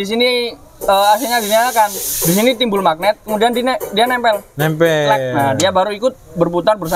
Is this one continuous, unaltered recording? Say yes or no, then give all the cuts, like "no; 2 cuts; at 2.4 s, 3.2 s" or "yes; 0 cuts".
yes; 0 cuts